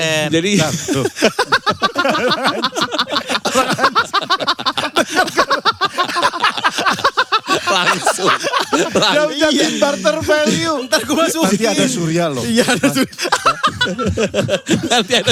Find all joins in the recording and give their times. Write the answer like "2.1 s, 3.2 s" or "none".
none